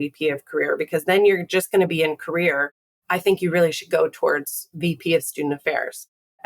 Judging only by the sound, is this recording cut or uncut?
uncut